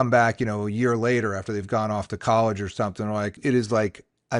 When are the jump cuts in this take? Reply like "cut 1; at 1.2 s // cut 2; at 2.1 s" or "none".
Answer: cut 1; at 3.4 s